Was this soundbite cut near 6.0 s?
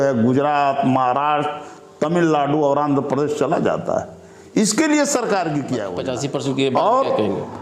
yes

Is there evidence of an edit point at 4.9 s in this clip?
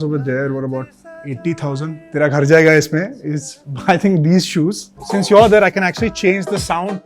yes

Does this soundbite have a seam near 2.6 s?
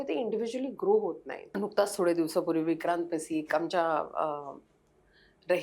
no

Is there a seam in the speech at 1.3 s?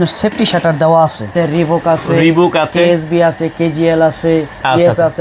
yes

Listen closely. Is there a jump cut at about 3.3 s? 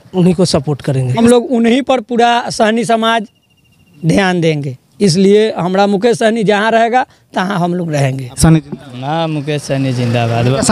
no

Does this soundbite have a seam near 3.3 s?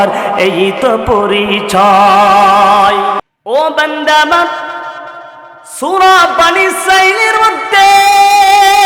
yes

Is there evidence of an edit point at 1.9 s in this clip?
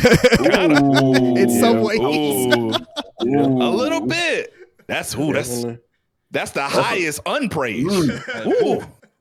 no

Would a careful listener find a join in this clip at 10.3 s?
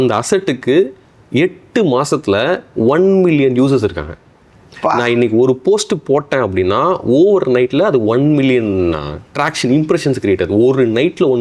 no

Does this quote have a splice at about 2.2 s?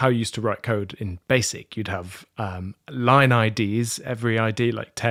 no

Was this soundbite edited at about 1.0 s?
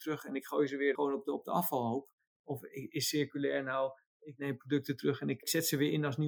yes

